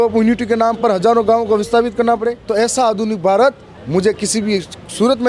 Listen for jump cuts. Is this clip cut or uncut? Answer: cut